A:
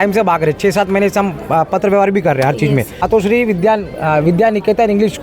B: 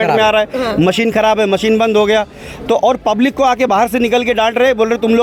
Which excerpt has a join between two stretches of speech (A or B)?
A